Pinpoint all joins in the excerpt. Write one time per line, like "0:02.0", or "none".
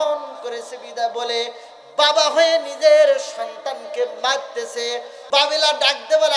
0:05.1